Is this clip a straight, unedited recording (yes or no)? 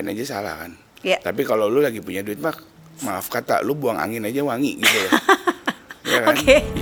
yes